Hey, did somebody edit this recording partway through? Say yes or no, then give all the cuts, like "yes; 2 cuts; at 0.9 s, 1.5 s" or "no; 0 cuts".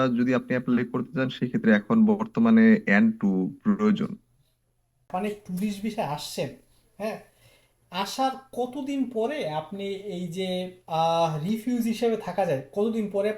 yes; 1 cut; at 5.1 s